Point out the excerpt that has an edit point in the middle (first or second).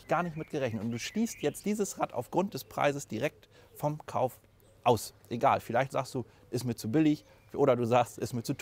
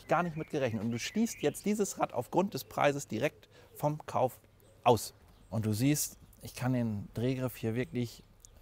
second